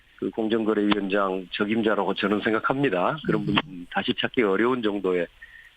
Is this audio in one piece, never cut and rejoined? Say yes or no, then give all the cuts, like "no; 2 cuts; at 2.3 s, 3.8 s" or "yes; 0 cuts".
no; 1 cut; at 1.1 s